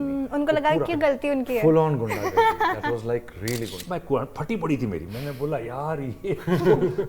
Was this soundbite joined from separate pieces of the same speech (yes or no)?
yes